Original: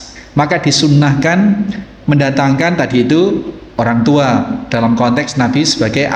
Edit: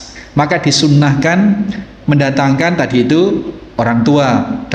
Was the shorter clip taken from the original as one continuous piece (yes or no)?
yes